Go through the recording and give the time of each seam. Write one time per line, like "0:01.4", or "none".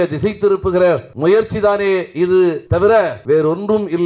0:01.1
0:02.8